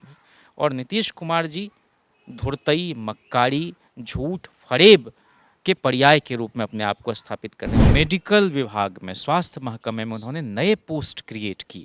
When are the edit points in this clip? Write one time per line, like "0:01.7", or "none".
0:07.9